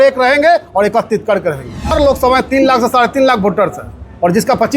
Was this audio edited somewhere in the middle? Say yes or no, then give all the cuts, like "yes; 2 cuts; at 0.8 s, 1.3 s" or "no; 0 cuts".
yes; 1 cut; at 1.9 s